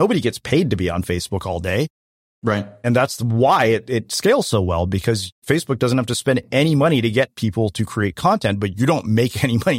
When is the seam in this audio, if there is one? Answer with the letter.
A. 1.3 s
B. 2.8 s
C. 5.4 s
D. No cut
C